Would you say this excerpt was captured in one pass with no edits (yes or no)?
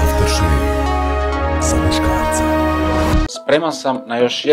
no